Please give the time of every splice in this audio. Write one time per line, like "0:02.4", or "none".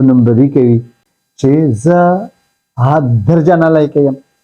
0:01.1

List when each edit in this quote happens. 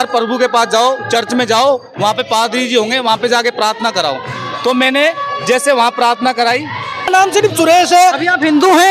0:07.1

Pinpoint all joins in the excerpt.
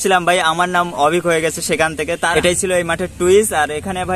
0:02.3

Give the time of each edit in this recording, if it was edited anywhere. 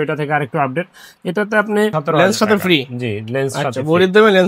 0:02.0

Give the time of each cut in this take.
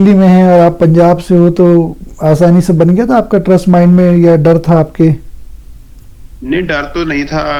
none

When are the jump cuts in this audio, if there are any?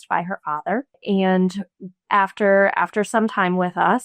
0:01.0

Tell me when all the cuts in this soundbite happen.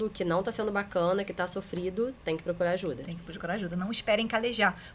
none

